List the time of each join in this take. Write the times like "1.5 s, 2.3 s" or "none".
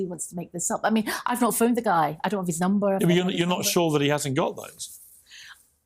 3.8 s